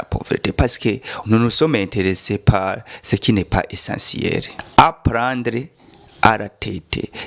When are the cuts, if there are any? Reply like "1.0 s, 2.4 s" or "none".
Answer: 1.1 s, 4.6 s